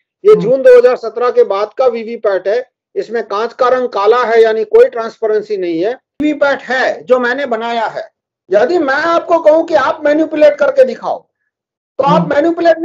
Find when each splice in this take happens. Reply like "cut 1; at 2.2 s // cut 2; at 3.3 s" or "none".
cut 1; at 6.2 s